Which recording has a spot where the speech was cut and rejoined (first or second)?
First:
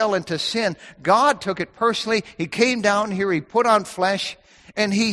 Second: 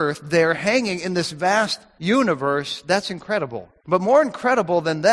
second